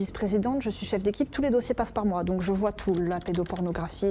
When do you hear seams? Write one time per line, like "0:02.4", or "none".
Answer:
none